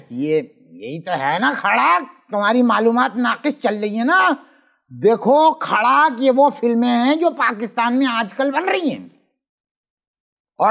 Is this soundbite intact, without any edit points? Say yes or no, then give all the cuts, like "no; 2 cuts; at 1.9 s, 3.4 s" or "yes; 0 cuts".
yes; 0 cuts